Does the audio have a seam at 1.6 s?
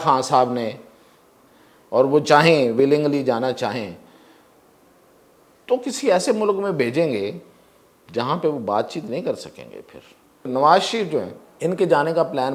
no; 2 cuts; at 10.5 s, 11.4 s

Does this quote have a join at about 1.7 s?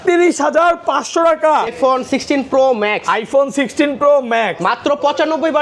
yes; 1 cut; at 1.7 s

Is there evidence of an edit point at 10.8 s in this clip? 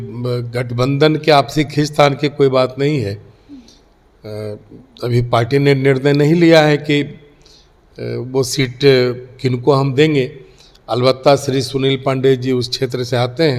no; 0 cuts

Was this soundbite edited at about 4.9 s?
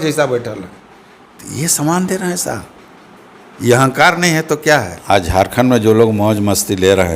yes; 1 cut; at 4.9 s

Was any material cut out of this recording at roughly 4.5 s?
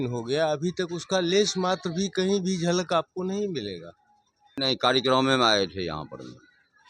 yes; 1 cut; at 4.5 s

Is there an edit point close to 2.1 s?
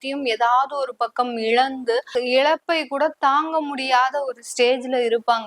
yes; 1 cut; at 2.1 s

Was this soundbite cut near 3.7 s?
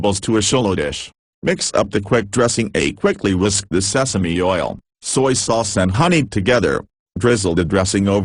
no; 1 cut; at 2.4 s

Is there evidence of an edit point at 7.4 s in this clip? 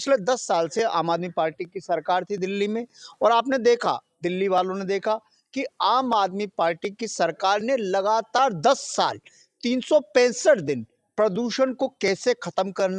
no; 0 cuts

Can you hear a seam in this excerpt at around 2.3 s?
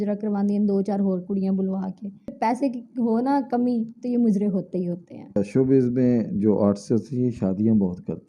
yes; 2 cuts; at 2.3 s, 5.4 s

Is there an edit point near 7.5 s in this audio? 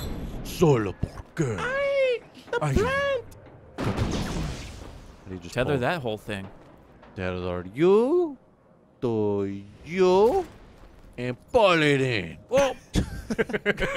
yes; 1 cut; at 7.5 s

